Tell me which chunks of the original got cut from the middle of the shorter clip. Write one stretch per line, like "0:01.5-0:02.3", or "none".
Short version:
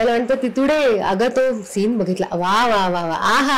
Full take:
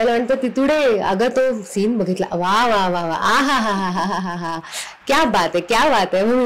none